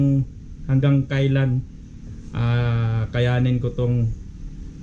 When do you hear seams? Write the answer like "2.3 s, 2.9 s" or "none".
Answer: none